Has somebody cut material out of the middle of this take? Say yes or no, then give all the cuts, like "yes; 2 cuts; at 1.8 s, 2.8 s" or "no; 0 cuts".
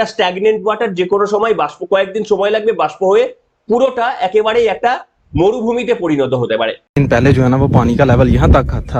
yes; 1 cut; at 6.8 s